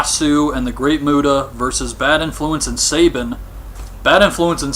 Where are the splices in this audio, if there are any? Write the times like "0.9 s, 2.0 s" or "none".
1.5 s